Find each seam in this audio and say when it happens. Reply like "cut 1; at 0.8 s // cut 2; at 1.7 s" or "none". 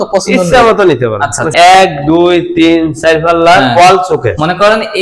cut 1; at 1.5 s

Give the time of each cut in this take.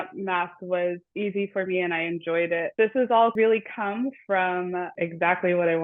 cut 1; at 1.1 s // cut 2; at 2.7 s // cut 3; at 3.3 s // cut 4; at 4.9 s

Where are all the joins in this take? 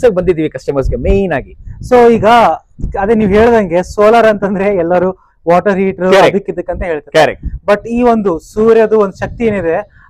none

